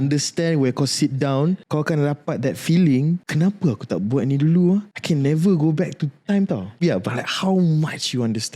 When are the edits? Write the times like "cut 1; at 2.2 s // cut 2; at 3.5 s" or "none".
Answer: cut 1; at 1.6 s // cut 2; at 3.3 s // cut 3; at 4.9 s // cut 4; at 6.8 s